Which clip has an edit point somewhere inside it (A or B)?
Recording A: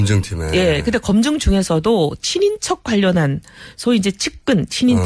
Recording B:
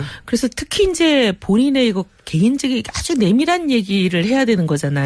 B